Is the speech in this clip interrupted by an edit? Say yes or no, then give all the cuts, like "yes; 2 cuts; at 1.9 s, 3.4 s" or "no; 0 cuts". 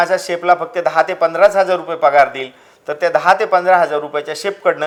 no; 0 cuts